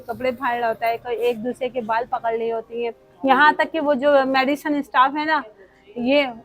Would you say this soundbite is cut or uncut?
cut